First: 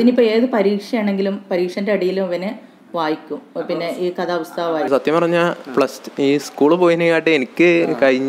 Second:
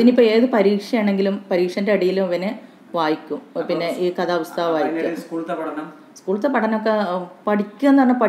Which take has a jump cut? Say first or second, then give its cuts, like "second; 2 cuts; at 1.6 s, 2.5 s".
first; 1 cut; at 4.9 s